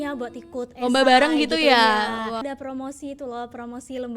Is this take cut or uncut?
cut